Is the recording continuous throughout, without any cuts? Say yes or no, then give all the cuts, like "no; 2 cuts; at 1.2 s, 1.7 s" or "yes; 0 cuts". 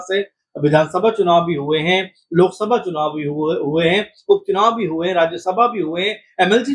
yes; 0 cuts